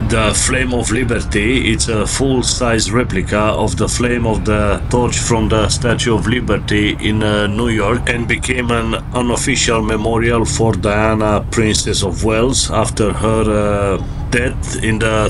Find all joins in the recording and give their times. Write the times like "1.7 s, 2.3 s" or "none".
none